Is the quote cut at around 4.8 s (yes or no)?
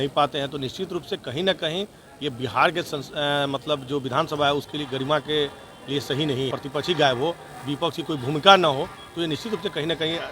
no